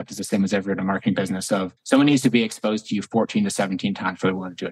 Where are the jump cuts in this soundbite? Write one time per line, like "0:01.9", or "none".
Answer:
0:01.7

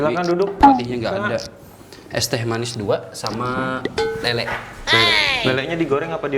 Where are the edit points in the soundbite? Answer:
none

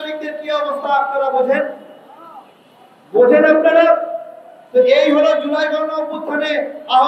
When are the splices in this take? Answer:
none

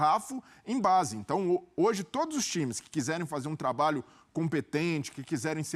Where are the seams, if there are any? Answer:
none

